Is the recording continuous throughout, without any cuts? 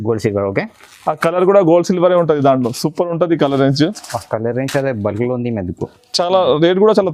yes; 0 cuts

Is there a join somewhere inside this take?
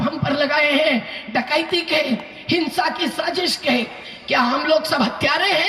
no; 0 cuts

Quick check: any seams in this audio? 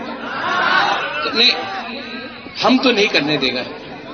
no; 0 cuts

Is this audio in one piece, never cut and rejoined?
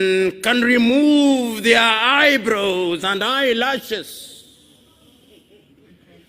yes; 0 cuts

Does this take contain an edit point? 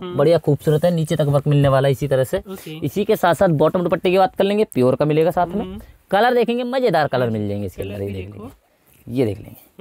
no; 0 cuts

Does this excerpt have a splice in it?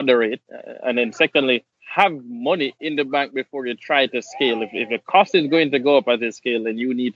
yes; 1 cut; at 1.8 s

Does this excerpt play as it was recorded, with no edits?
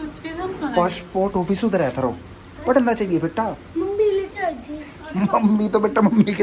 yes; 0 cuts

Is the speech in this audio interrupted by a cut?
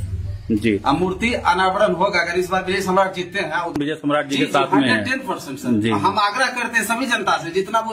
yes; 1 cut; at 3.8 s

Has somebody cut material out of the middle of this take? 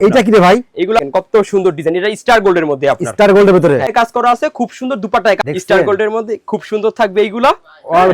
yes; 3 cuts; at 1.0 s, 3.9 s, 5.4 s

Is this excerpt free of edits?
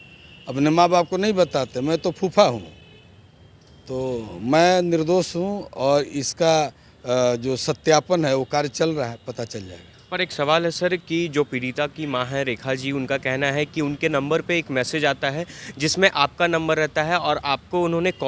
yes; 0 cuts

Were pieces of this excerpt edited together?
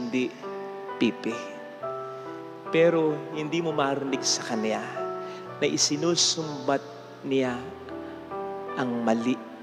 no; 0 cuts

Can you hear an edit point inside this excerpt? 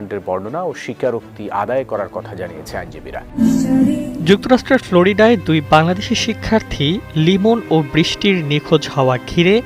yes; 1 cut; at 3.3 s

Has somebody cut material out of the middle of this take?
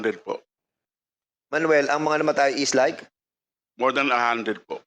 yes; 1 cut; at 1.2 s

